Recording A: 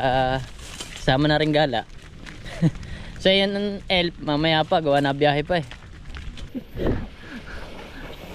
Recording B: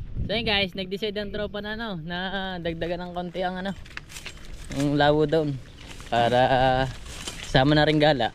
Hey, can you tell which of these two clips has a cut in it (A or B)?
A